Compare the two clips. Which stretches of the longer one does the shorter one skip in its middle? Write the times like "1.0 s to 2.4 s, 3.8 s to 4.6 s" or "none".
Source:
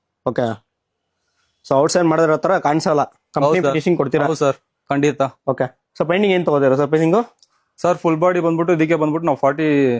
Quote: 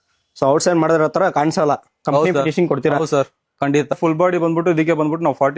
5.2 s to 8.0 s